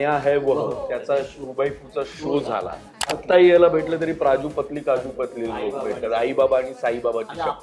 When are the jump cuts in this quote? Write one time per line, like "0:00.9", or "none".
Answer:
0:03.2